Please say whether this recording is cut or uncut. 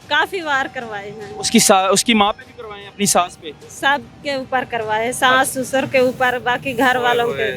uncut